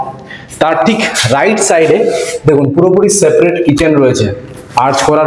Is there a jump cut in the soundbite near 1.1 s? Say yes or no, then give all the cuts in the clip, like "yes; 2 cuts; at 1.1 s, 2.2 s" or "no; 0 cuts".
no; 0 cuts